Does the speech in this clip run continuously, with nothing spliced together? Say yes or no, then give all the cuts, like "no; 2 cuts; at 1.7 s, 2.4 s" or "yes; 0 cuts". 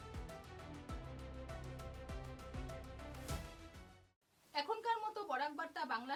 yes; 0 cuts